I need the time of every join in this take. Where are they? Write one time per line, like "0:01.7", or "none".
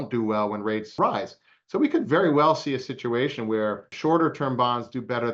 0:00.9
0:03.9